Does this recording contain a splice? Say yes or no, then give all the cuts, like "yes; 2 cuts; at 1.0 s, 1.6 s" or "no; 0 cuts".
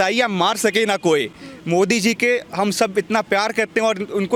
no; 0 cuts